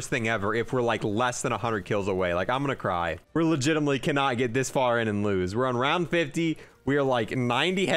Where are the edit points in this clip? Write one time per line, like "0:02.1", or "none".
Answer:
0:03.2

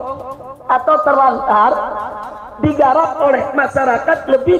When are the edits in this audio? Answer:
none

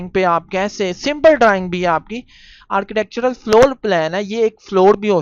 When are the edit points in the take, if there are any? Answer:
none

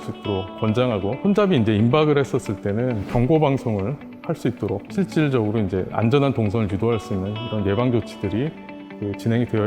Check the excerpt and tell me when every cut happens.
0:01.2
0:03.1
0:04.9

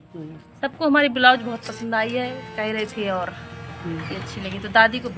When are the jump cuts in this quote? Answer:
none

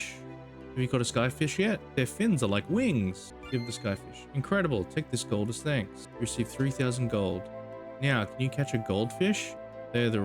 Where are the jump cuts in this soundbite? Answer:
0:03.3
0:06.0

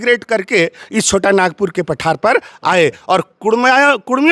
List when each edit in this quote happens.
none

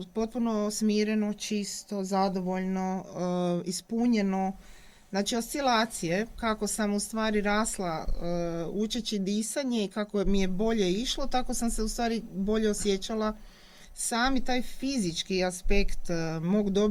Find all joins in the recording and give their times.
none

